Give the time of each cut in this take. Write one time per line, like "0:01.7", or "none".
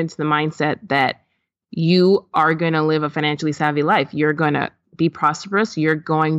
none